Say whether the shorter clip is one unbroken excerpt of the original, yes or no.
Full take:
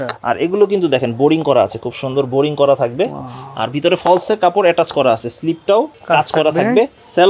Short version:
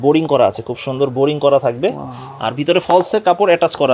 yes